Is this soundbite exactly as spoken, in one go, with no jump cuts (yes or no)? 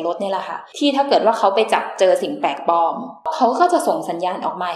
yes